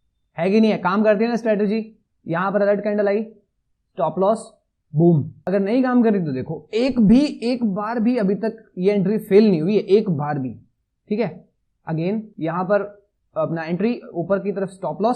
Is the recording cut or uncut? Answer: cut